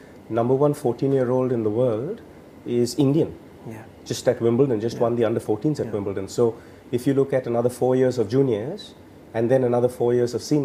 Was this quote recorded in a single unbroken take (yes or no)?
yes